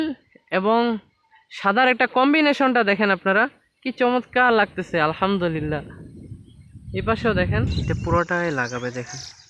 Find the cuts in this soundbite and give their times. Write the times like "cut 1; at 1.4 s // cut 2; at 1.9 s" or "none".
cut 1; at 7.9 s